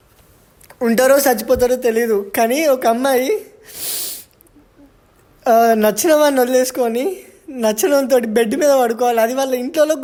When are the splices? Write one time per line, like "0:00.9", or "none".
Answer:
none